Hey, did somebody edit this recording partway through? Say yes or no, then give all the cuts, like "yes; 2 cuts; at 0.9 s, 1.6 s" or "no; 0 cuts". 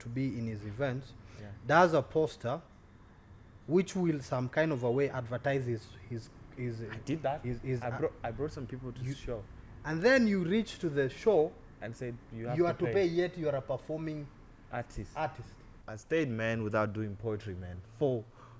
yes; 1 cut; at 15.7 s